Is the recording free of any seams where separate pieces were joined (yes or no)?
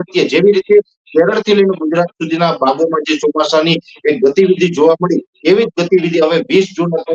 yes